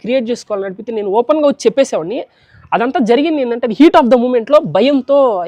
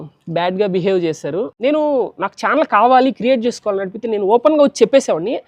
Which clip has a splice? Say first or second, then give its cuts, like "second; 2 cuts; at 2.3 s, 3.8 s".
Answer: second; 1 cut; at 1.5 s